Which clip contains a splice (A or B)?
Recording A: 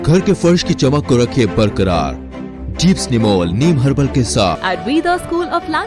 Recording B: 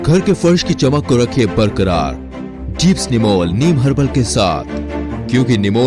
A